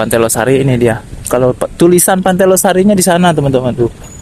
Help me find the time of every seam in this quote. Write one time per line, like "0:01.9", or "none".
none